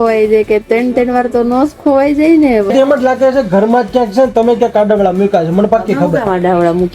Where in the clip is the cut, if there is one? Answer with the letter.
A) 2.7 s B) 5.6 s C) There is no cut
A